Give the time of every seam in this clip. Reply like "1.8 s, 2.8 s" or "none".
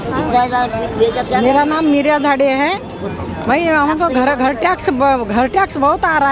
none